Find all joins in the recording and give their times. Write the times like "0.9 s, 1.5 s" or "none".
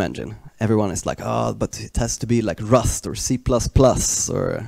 none